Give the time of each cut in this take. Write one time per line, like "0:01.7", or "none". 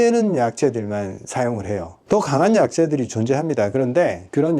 0:01.9